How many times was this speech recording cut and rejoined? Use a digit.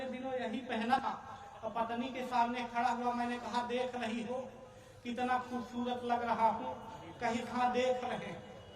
1